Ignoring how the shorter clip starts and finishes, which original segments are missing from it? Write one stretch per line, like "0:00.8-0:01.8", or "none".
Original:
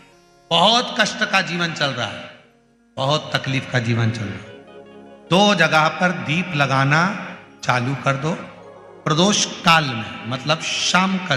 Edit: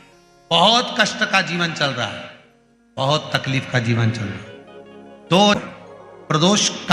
0:05.6-0:08.3